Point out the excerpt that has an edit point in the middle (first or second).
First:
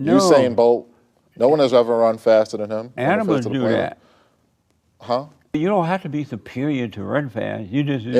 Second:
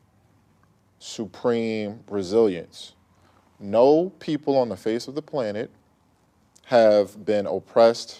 first